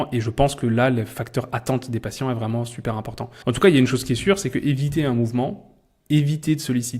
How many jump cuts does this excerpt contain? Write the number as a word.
one